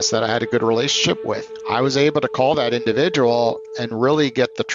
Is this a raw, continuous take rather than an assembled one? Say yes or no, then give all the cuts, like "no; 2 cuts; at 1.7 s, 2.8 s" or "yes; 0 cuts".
yes; 0 cuts